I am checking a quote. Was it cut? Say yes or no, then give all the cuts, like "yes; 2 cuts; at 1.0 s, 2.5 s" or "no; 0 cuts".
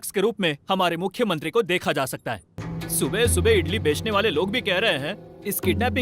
yes; 1 cut; at 2.6 s